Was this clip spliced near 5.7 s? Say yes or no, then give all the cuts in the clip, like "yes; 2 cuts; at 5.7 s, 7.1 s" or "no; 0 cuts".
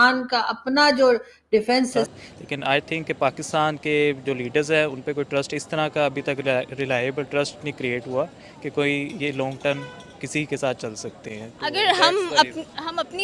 no; 1 cut; at 2.1 s